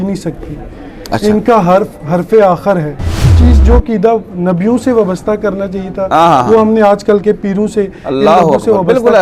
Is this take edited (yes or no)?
yes